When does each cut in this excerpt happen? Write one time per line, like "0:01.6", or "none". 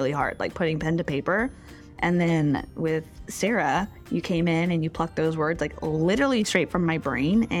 0:01.7